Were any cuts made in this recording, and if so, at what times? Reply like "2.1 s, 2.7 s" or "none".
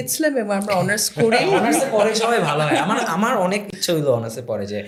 none